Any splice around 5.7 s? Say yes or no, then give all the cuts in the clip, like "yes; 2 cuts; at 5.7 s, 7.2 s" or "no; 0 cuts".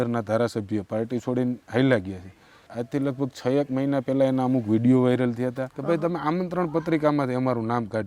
yes; 2 cuts; at 2.7 s, 5.7 s